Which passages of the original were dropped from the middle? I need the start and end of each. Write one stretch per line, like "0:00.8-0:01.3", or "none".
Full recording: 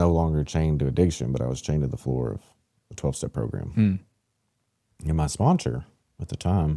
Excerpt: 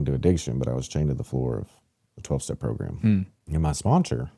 0:04.1-0:04.9